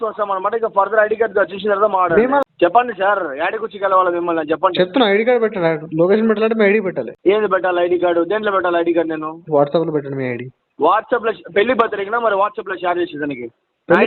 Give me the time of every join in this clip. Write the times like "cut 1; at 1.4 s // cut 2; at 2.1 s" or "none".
cut 1; at 2.4 s